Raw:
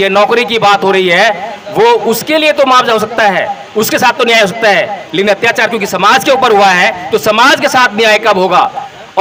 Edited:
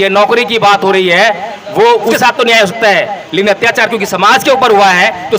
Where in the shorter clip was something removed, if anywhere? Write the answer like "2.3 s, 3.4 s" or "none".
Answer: 2.2 s